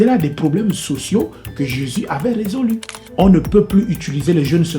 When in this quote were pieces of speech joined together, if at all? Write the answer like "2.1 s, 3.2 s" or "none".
3.0 s